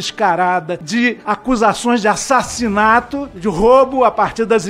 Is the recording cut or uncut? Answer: cut